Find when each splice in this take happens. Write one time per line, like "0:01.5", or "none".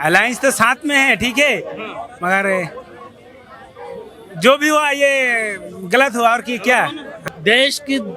0:07.2